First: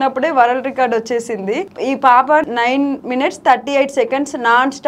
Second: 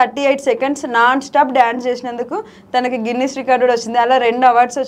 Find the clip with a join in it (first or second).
first